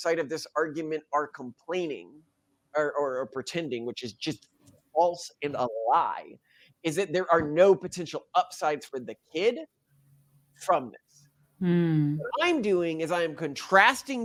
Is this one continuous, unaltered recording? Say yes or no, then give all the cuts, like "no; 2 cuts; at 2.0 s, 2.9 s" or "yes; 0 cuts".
yes; 0 cuts